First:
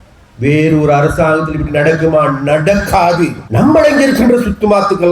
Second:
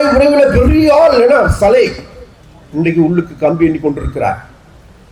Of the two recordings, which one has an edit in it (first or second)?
first